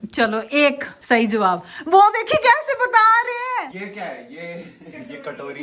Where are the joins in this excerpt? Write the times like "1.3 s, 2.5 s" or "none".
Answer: 0.9 s, 3.7 s